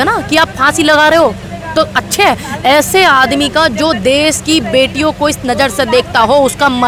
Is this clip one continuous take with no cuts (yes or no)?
yes